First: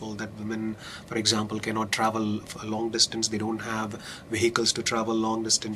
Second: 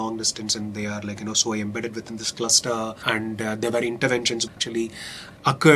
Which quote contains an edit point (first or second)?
second